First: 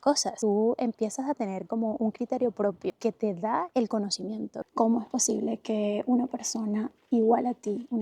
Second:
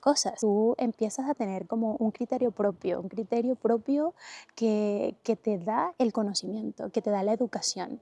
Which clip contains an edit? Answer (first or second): first